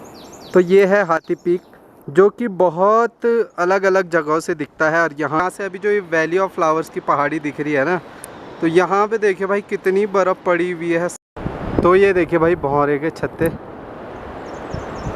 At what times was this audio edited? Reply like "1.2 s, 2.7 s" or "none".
5.4 s, 11.3 s